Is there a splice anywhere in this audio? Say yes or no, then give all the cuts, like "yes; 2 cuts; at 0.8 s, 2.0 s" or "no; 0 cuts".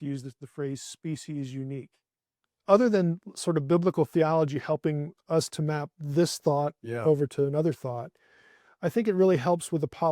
yes; 1 cut; at 2.5 s